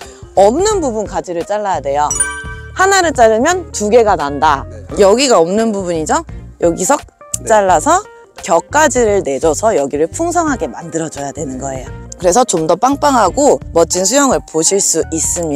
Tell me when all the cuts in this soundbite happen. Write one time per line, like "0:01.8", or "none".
0:12.0